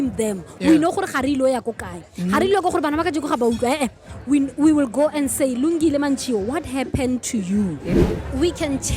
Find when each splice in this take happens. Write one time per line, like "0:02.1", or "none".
0:07.9